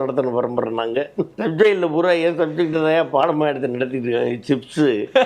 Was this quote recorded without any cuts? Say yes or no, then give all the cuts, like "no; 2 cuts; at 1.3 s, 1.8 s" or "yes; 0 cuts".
no; 1 cut; at 1.3 s